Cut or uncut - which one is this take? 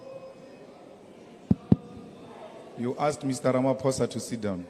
cut